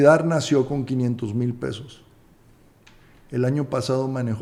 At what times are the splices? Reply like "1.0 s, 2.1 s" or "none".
none